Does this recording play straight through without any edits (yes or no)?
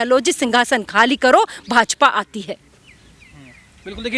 yes